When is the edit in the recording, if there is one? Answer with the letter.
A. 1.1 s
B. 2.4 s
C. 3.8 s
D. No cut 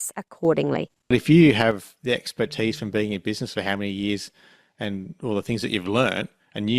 A